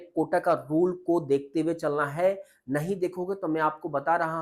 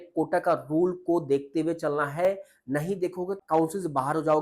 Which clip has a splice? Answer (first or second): second